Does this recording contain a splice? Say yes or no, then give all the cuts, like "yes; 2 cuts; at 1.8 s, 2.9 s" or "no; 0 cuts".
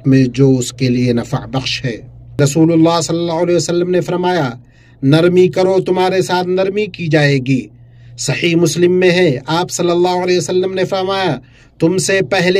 yes; 1 cut; at 2.4 s